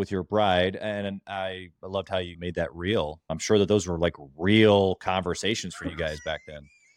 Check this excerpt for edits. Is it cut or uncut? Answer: cut